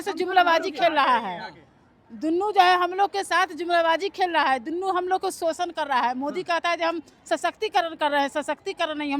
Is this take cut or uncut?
uncut